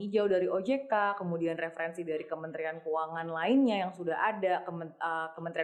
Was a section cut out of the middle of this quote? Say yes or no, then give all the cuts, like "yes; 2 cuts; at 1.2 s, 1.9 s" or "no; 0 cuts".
no; 0 cuts